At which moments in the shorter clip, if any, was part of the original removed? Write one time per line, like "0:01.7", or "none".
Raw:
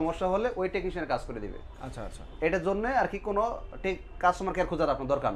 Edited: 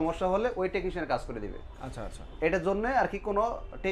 none